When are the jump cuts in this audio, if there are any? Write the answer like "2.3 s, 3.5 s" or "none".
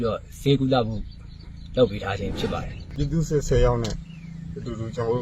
2.9 s